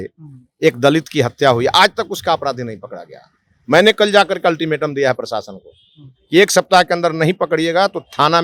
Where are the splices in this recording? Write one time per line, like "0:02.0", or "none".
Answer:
none